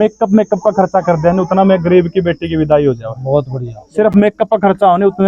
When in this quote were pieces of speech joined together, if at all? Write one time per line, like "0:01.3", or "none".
none